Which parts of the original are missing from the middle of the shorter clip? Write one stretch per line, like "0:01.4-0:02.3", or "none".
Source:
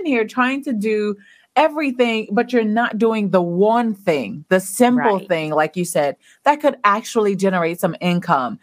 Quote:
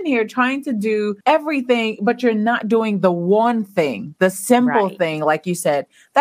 0:01.2-0:01.5